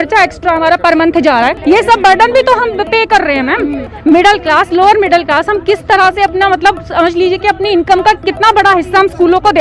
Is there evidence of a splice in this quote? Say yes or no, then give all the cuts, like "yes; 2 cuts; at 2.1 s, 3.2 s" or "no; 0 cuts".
yes; 1 cut; at 3.9 s